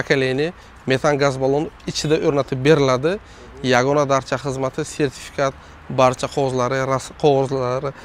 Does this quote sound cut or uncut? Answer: uncut